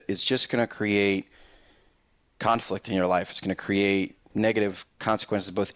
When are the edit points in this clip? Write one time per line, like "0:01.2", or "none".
0:04.3

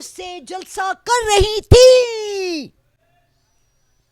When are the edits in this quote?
none

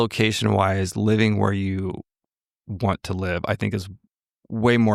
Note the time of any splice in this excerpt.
none

